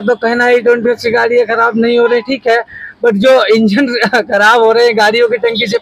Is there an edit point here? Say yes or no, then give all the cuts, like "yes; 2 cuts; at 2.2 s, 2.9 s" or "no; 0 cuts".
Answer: no; 0 cuts